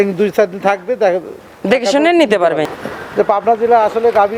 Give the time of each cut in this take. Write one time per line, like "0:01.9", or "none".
0:02.7